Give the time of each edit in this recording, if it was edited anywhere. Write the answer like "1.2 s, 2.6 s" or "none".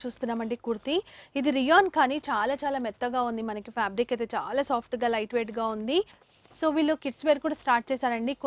6.2 s